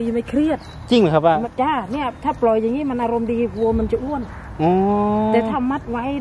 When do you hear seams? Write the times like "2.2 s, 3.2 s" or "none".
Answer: none